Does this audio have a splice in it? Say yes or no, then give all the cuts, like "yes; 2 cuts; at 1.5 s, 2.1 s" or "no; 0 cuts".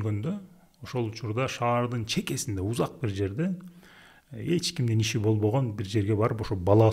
no; 0 cuts